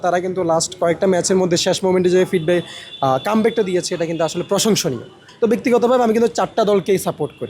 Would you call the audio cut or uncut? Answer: cut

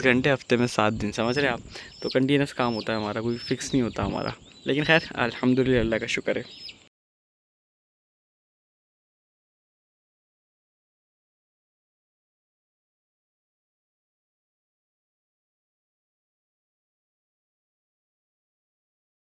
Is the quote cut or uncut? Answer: uncut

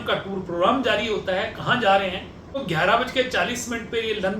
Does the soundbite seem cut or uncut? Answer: cut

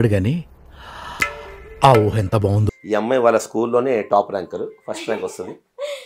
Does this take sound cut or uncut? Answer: cut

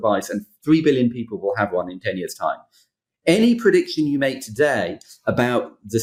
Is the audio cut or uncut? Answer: uncut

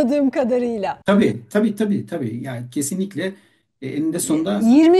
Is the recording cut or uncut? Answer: uncut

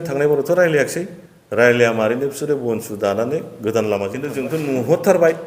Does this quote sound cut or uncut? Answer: cut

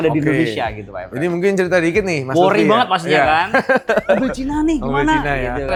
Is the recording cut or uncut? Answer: uncut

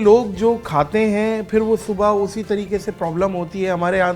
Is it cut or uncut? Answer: uncut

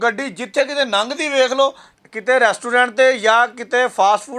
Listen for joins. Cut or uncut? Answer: uncut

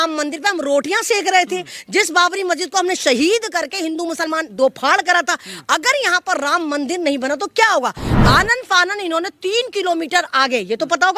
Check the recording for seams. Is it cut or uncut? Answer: uncut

